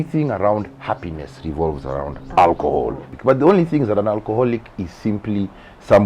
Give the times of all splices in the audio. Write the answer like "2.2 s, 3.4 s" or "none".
3.1 s